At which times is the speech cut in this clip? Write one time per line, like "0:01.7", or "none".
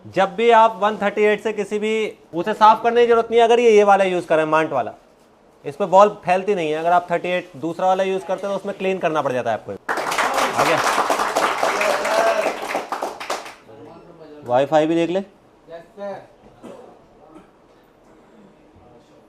0:09.8